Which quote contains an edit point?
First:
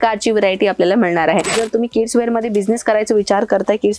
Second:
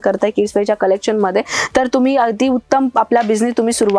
first; 1 cut; at 1.6 s

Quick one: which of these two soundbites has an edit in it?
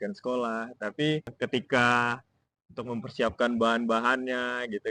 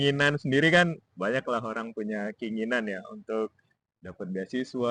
first; 1 cut; at 1.3 s

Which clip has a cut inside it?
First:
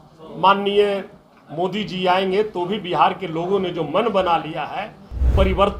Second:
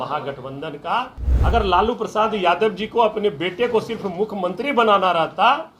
second; 1 cut; at 1.2 s

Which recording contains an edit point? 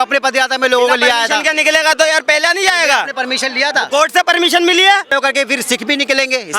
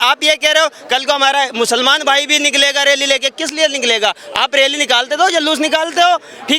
first; 1 cut; at 5.1 s

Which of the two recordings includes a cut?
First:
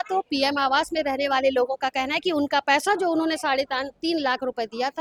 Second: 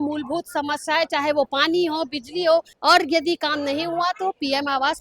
second; 1 cut; at 2.7 s

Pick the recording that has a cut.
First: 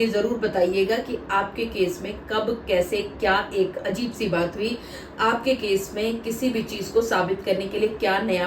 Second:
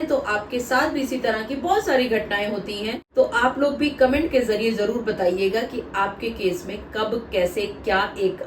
second; 1 cut; at 3.0 s

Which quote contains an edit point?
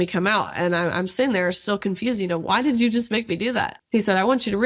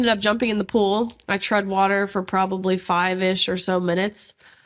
first; 1 cut; at 3.8 s

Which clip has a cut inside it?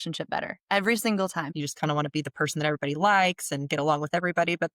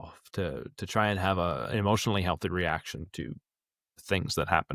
first; 1 cut; at 1.5 s

